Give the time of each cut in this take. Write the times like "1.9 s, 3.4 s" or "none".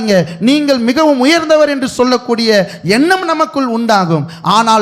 none